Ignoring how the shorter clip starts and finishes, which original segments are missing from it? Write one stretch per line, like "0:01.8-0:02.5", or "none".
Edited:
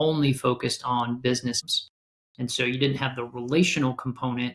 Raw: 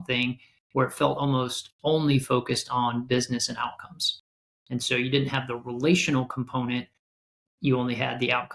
0:03.5-0:04.0